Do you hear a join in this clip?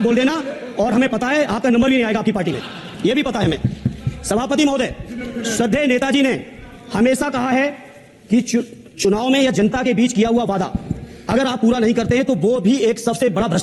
no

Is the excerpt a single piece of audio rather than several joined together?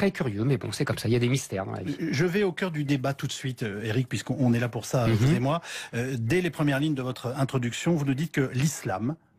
no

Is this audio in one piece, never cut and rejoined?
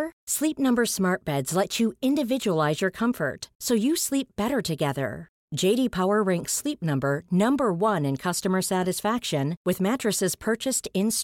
yes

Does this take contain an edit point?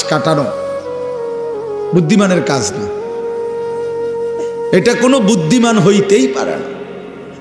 yes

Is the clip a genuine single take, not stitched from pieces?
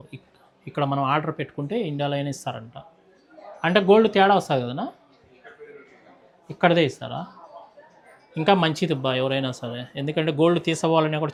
yes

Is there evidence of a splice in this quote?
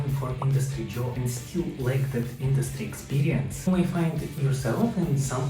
no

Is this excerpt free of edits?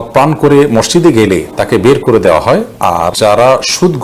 no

